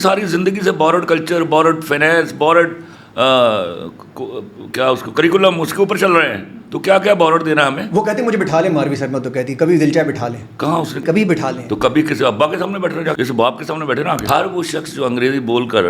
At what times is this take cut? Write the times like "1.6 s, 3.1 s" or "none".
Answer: 11.0 s, 13.1 s, 14.2 s